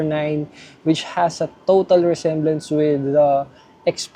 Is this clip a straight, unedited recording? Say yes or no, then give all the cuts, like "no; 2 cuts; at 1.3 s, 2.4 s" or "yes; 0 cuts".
yes; 0 cuts